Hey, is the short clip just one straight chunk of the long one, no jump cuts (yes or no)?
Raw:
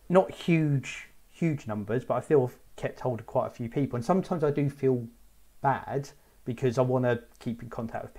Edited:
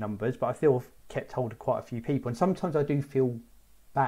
yes